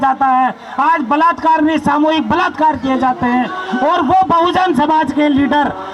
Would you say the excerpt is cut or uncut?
uncut